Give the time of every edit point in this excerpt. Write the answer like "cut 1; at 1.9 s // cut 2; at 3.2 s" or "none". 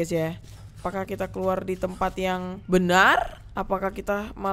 cut 1; at 0.8 s // cut 2; at 2.6 s // cut 3; at 3.4 s